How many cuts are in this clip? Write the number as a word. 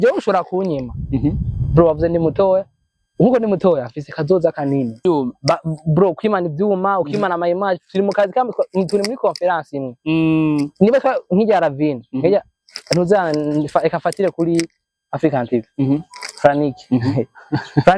one